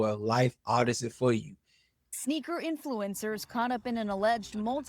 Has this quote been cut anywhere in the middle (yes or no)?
yes